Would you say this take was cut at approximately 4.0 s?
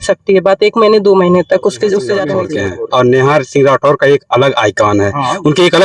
no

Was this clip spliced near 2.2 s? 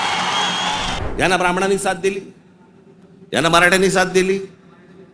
no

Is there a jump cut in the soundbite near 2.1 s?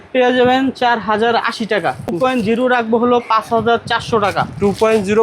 yes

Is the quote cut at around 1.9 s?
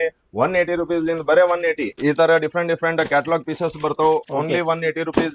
yes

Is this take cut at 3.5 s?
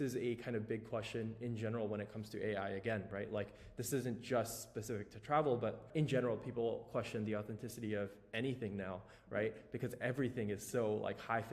no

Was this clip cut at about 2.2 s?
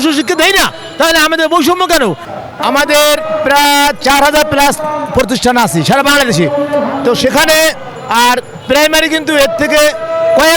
yes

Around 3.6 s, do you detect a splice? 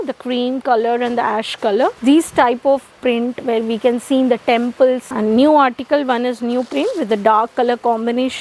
no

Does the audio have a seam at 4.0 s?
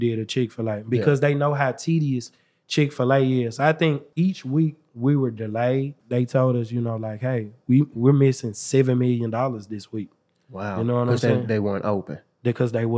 yes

